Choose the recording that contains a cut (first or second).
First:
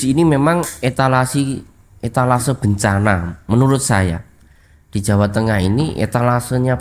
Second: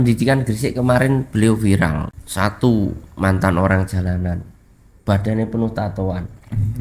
second